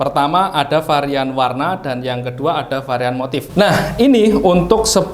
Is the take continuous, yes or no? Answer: no